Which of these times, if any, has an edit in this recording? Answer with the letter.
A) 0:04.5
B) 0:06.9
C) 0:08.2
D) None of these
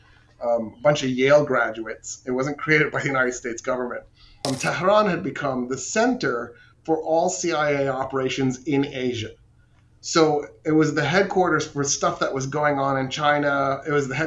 A